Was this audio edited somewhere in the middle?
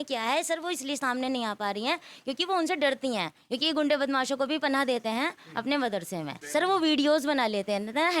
yes; 1 cut; at 6.4 s

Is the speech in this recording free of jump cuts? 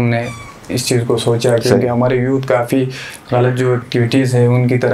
no; 1 cut; at 3.9 s

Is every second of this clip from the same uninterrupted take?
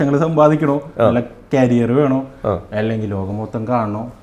yes; 0 cuts

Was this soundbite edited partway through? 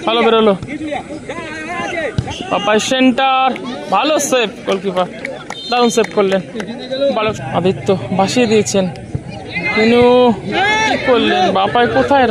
no; 0 cuts

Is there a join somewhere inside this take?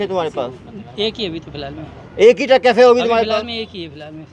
no; 0 cuts

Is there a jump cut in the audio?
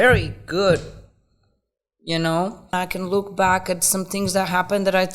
yes; 1 cut; at 2.7 s

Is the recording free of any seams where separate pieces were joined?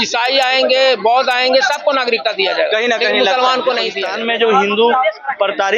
no; 1 cut; at 4.0 s

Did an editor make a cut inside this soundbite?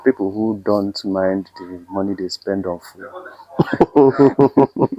no; 0 cuts

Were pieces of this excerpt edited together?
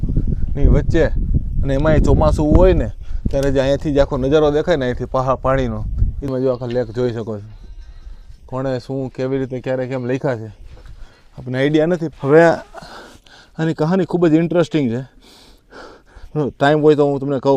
yes; 2 cuts; at 6.3 s, 12.1 s

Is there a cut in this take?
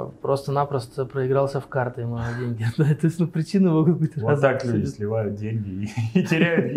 no; 0 cuts

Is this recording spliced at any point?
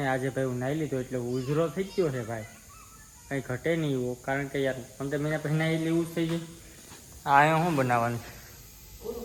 no; 0 cuts

